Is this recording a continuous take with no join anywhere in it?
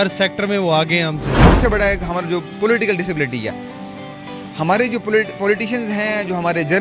no; 1 cut; at 1.5 s

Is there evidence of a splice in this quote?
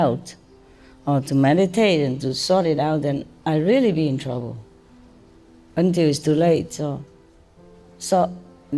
no; 0 cuts

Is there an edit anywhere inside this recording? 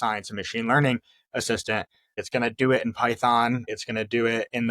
yes; 2 cuts; at 2.2 s, 3.7 s

